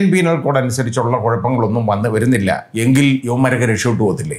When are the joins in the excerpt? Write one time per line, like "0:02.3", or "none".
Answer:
0:02.7
0:03.3